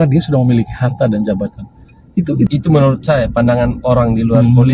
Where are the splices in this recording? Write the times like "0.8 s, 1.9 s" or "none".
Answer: 2.5 s